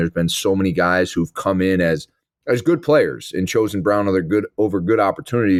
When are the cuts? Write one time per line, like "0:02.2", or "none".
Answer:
none